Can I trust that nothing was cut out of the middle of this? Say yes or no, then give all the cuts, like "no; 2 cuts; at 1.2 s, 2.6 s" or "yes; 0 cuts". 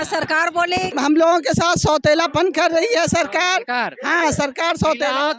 no; 1 cut; at 0.9 s